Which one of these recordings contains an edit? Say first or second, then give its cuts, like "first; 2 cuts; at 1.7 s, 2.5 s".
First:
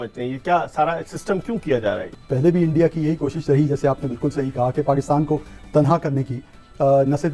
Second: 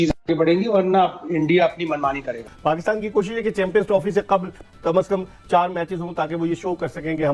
second; 1 cut; at 2.5 s